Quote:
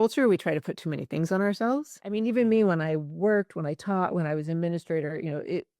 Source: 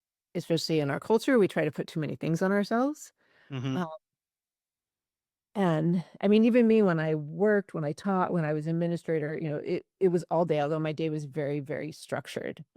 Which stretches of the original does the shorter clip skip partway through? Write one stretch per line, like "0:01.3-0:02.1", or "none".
0:03.1-0:06.2